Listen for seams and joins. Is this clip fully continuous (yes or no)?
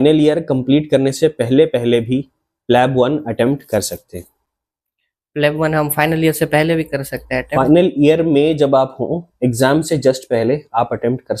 yes